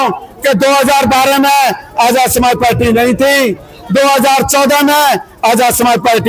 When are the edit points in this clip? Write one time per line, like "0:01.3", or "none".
none